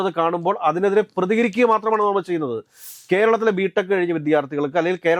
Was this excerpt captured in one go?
yes; 0 cuts

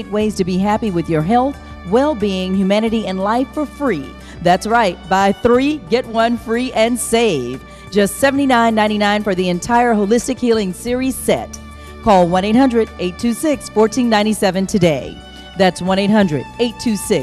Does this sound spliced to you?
no; 0 cuts

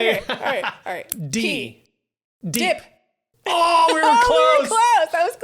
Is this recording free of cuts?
no; 1 cut; at 1.1 s

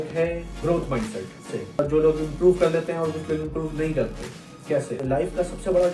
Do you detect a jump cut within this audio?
yes; 2 cuts; at 1.5 s, 4.9 s

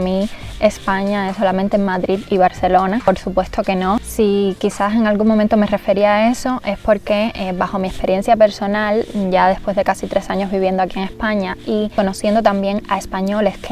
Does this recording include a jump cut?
no; 0 cuts

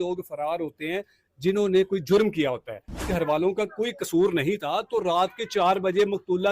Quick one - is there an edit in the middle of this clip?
yes; 1 cut; at 3.0 s

